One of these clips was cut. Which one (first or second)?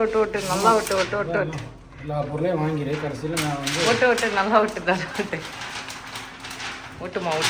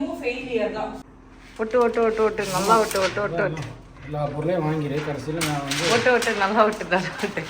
second